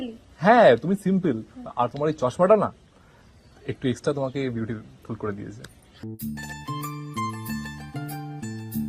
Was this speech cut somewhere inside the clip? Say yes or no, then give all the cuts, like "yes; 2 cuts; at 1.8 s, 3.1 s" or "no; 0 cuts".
no; 0 cuts